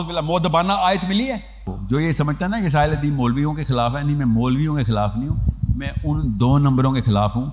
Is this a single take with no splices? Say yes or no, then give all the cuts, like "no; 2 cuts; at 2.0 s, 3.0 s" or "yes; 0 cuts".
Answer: no; 1 cut; at 1.7 s